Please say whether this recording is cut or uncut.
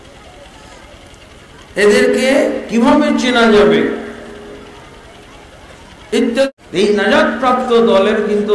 cut